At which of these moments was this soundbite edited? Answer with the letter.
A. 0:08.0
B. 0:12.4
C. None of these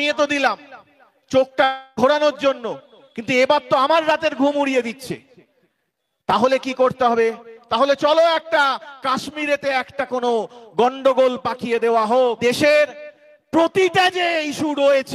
B